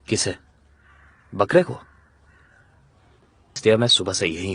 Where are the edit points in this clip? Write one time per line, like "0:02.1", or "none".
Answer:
0:03.6